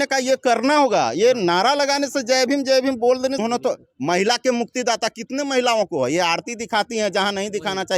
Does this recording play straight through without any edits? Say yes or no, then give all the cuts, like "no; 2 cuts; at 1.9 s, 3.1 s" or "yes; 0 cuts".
no; 1 cut; at 3.4 s